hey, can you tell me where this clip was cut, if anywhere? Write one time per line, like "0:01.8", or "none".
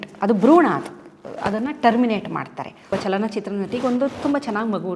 0:02.9